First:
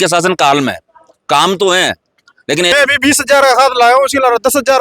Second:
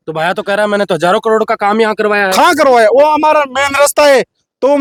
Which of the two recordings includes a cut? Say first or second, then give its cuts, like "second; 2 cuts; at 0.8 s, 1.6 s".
first; 1 cut; at 2.7 s